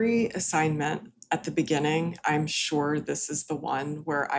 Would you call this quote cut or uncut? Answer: uncut